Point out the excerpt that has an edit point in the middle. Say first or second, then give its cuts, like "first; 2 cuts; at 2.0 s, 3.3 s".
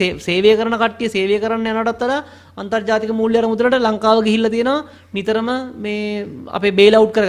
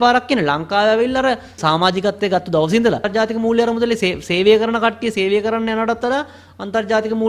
second; 2 cuts; at 1.6 s, 3.1 s